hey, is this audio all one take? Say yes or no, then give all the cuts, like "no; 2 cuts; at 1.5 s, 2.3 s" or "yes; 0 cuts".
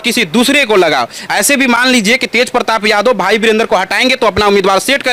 yes; 0 cuts